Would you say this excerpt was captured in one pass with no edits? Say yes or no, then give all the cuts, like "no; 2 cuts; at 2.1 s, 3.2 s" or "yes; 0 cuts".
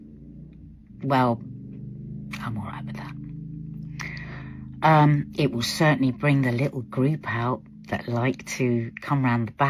yes; 0 cuts